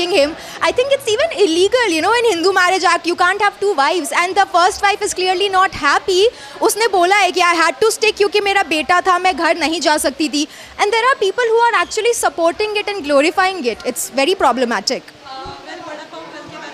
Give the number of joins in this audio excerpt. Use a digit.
0